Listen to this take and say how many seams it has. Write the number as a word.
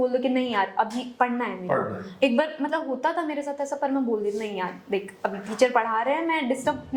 zero